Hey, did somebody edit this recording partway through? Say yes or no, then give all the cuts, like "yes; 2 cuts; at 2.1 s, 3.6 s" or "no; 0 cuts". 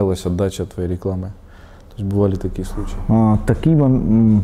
no; 0 cuts